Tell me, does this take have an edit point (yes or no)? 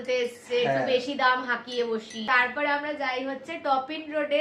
yes